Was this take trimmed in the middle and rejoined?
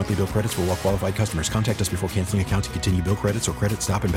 no; 0 cuts

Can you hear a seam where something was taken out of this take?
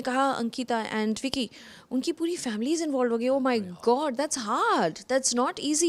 no; 0 cuts

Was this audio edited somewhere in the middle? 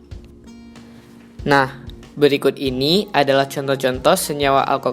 yes; 1 cut; at 1.4 s

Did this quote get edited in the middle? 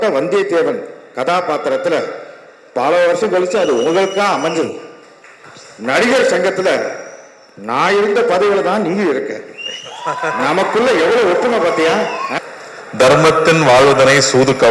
yes; 1 cut; at 12.3 s

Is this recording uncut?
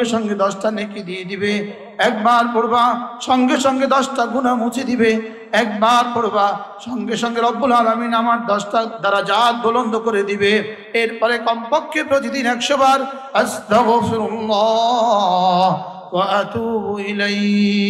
yes; 0 cuts

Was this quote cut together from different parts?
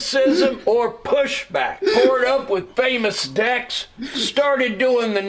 no; 0 cuts

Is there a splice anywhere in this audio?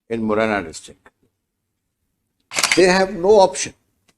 yes; 1 cut; at 2.7 s

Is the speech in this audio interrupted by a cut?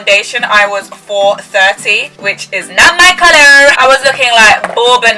no; 0 cuts

